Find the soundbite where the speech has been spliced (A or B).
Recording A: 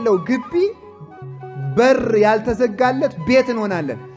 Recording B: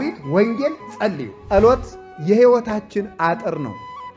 B